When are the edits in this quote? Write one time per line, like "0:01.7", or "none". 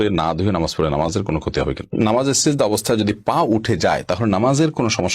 0:01.9